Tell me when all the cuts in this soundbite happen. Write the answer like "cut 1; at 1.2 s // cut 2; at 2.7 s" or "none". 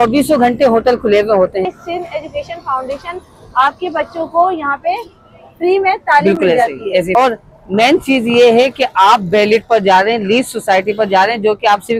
cut 1; at 1.7 s // cut 2; at 7.1 s